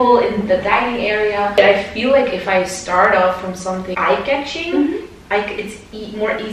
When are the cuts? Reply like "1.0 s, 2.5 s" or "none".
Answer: 1.6 s, 3.9 s